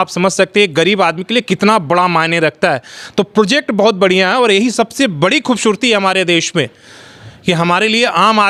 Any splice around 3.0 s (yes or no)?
no